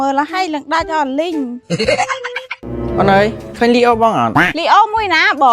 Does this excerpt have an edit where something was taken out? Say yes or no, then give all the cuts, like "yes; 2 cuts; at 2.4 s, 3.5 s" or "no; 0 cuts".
yes; 1 cut; at 2.6 s